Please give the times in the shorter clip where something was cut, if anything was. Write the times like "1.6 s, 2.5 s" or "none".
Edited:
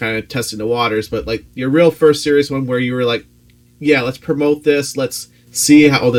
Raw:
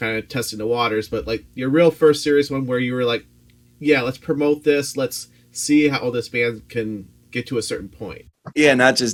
none